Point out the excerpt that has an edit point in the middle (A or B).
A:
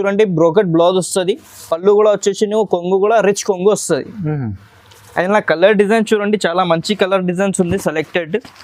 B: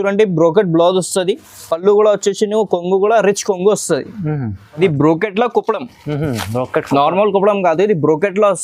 B